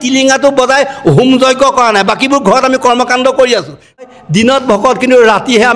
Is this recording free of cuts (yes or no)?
no